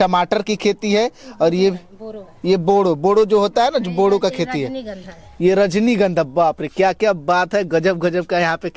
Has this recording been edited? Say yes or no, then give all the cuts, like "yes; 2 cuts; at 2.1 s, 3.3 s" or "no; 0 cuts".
no; 0 cuts